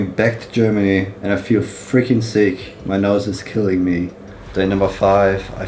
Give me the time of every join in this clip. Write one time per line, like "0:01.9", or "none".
0:01.1
0:04.3